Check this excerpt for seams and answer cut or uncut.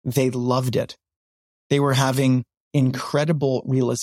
uncut